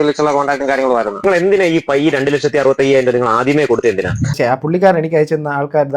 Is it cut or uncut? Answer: cut